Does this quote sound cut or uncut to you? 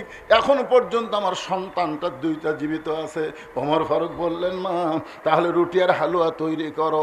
uncut